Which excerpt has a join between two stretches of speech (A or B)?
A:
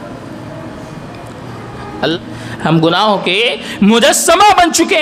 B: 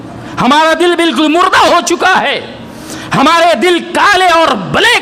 A